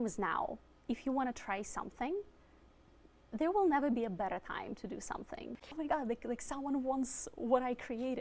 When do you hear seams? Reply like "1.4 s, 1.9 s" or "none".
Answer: 5.7 s